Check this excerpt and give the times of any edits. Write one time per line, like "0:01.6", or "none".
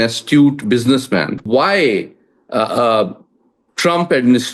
0:01.4

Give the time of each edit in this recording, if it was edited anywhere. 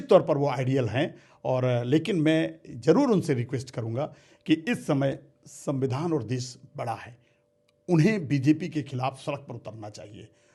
none

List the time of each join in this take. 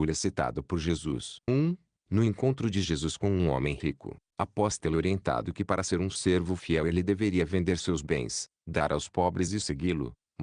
0:01.3

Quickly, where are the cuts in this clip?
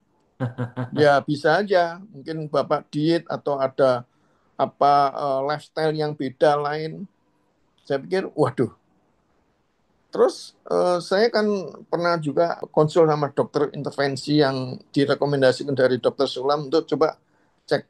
0:12.6

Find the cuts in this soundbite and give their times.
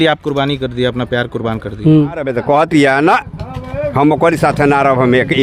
0:02.3

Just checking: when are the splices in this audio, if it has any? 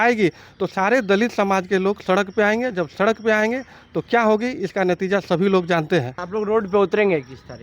0:06.2

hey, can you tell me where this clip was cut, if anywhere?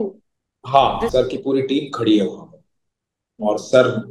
0:01.1

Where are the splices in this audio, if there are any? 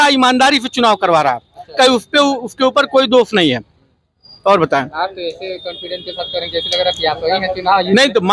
none

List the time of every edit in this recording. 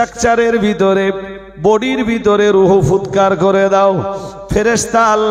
none

